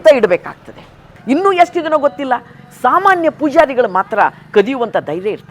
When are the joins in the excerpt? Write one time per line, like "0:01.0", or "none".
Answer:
0:01.1

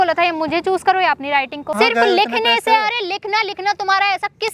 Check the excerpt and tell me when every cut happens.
0:01.8

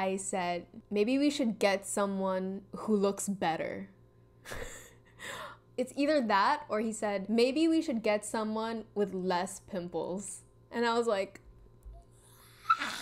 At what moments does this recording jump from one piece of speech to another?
none

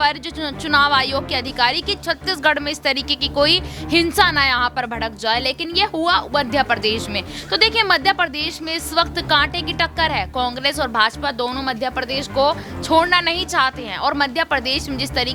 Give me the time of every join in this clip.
none

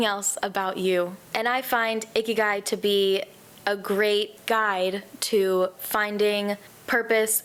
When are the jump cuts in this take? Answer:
none

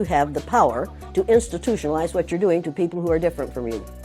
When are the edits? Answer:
none

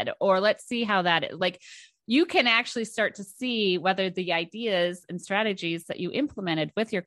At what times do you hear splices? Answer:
none

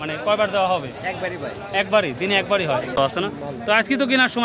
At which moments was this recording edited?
0:03.0

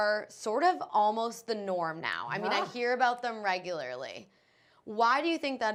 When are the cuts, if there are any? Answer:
none

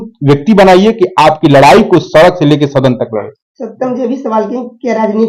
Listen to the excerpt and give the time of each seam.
none

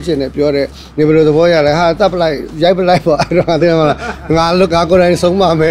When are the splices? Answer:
0:02.5

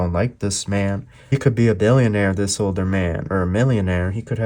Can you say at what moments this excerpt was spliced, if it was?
0:01.3

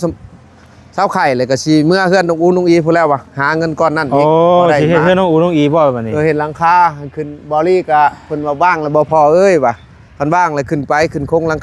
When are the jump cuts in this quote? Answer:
none

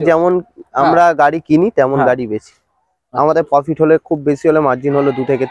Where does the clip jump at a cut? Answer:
none

